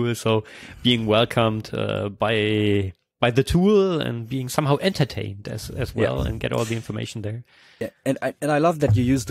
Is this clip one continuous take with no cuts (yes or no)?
yes